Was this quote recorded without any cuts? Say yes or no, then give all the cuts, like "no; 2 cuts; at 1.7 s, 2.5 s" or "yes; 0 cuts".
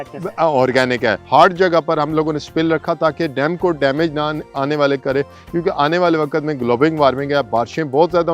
no; 1 cut; at 1.2 s